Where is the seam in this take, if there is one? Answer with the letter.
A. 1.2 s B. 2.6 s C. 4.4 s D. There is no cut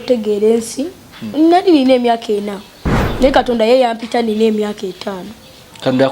A